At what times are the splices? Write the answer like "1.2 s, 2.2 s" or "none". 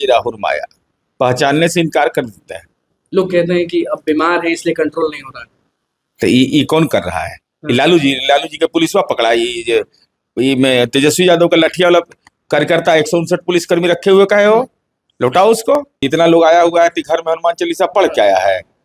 15.9 s

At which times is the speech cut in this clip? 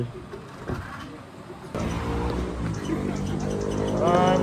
1.8 s

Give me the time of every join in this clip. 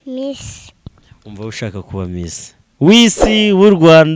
none

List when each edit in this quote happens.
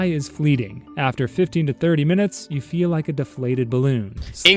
none

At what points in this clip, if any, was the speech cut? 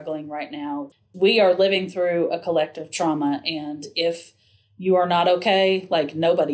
0.9 s

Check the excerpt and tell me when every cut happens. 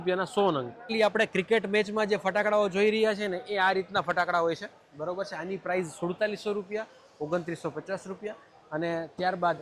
0.9 s

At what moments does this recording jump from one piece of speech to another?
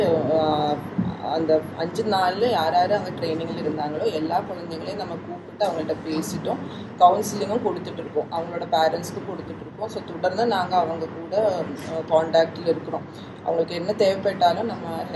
none

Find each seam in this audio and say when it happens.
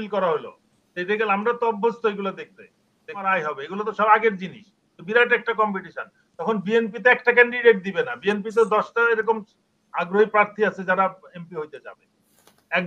3.3 s

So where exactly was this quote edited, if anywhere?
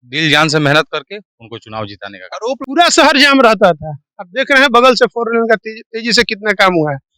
2.6 s

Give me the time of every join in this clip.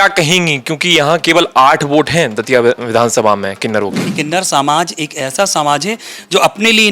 4.1 s

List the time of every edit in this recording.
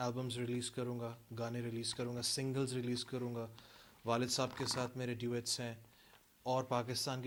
none

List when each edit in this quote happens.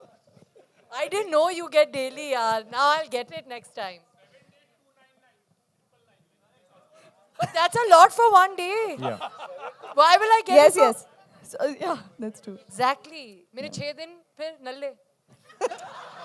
none

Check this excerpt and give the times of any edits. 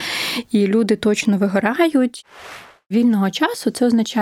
2.3 s

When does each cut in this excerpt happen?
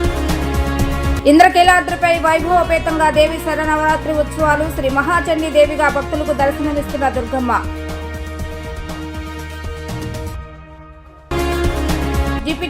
1.0 s

